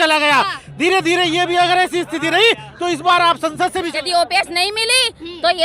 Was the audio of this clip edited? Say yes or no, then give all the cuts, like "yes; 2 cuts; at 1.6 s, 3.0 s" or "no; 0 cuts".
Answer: yes; 1 cut; at 3.9 s